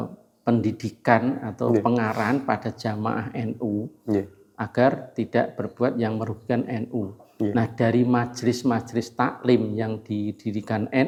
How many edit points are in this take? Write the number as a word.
zero